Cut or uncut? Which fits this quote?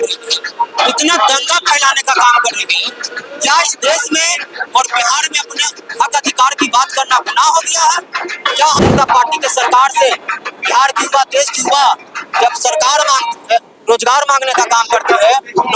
cut